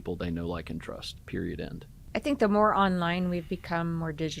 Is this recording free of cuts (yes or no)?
no